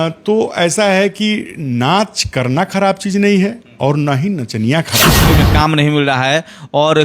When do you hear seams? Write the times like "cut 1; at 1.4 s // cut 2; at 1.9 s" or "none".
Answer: cut 1; at 5.3 s